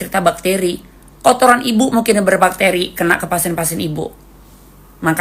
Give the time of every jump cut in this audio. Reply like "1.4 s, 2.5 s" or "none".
none